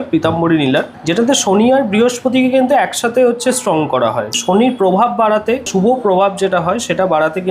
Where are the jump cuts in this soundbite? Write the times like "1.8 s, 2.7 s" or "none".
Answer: 1.0 s, 4.4 s, 5.7 s